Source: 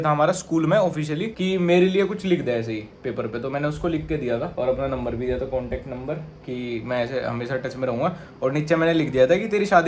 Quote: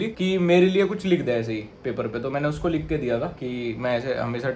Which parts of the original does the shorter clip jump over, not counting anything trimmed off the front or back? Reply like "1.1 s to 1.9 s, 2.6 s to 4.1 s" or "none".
4.5 s to 6.4 s